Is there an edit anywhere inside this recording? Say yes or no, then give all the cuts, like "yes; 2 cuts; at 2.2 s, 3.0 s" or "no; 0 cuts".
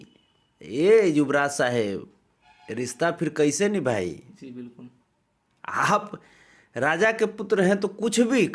no; 0 cuts